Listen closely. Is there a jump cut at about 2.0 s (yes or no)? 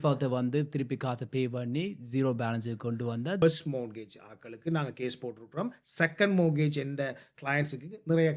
no